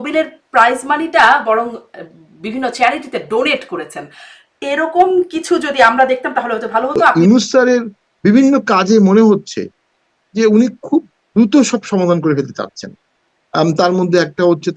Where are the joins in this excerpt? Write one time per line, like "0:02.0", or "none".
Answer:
0:07.1